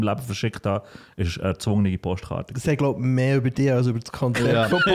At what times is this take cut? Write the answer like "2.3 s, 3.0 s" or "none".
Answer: none